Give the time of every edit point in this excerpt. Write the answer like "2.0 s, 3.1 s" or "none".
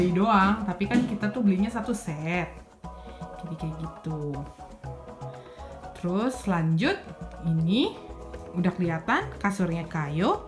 4.5 s, 6.0 s